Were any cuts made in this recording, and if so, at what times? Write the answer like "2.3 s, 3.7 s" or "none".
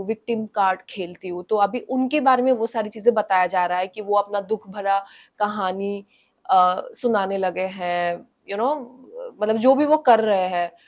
none